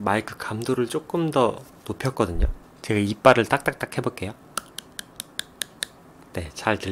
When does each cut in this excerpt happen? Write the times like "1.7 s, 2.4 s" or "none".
none